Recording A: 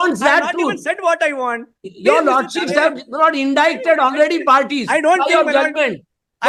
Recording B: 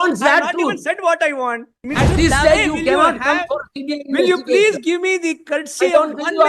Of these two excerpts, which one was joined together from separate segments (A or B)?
B